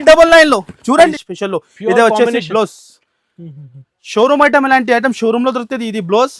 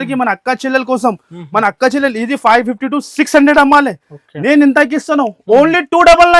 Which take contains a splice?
first; 1 cut; at 1.1 s

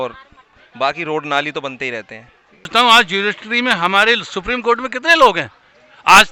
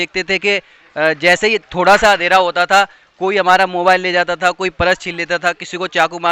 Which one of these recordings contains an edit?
first; 1 cut; at 2.7 s

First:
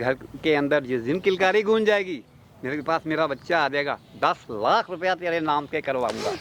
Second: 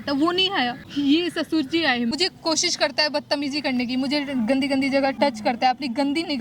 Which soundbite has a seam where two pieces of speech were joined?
second; 3 cuts; at 0.8 s, 2.1 s, 5.1 s

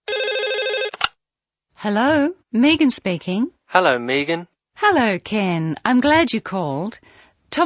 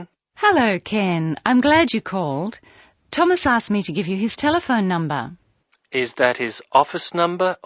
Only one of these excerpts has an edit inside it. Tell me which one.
first; 1 cut; at 1.2 s

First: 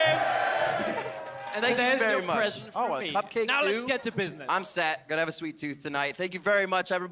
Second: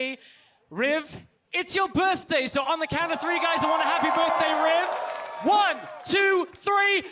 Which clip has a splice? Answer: first; 1 cut; at 2.0 s

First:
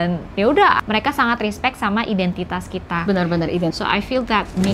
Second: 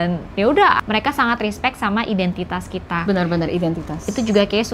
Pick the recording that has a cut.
first; 1 cut; at 3.8 s

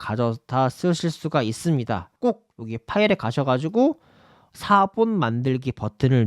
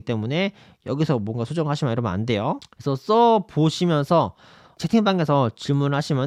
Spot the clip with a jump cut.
first; 1 cut; at 2.1 s

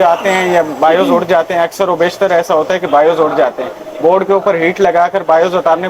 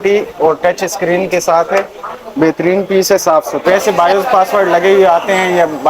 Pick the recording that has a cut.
second; 1 cut; at 3.6 s

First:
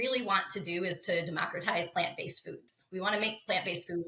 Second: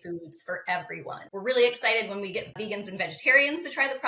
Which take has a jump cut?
second; 2 cuts; at 1.2 s, 2.6 s

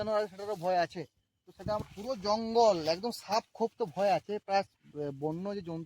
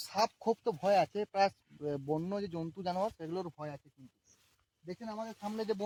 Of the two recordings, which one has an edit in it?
first; 1 cut; at 1.8 s

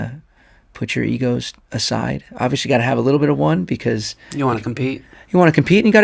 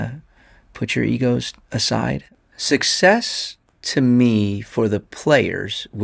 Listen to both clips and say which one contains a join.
second; 1 cut; at 2.3 s

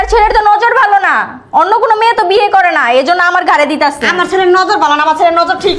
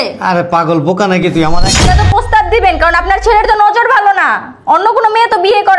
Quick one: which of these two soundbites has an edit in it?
second; 1 cut; at 1.8 s

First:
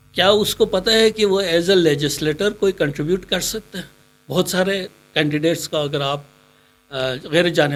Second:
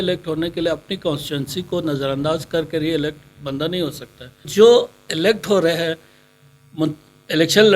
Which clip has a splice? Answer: second; 1 cut; at 4.5 s

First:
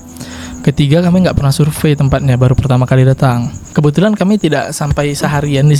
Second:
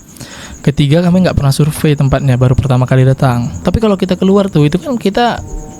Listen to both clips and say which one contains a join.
second; 1 cut; at 3.5 s

